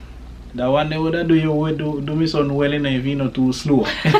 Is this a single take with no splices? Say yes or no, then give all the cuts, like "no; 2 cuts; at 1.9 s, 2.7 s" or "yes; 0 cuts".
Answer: yes; 0 cuts